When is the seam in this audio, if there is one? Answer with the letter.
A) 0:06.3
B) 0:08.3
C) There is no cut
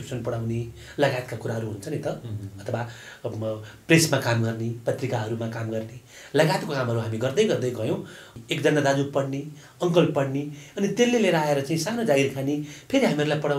B